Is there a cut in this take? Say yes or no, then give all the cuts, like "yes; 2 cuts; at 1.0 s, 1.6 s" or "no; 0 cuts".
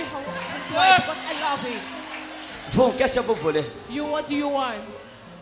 no; 0 cuts